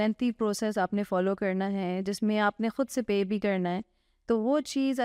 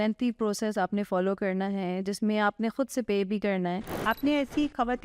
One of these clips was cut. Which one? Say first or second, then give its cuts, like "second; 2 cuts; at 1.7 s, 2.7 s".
second; 1 cut; at 4.0 s